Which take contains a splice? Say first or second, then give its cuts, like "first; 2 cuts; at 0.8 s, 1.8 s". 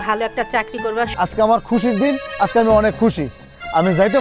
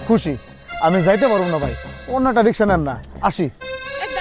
first; 1 cut; at 1.1 s